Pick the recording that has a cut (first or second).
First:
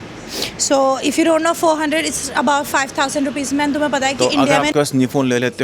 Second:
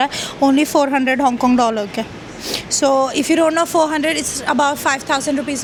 first